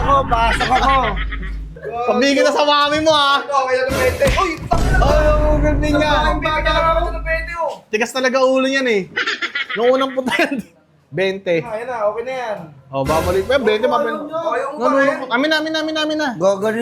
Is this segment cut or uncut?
uncut